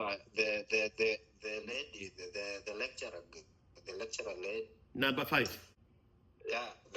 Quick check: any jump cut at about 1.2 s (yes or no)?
no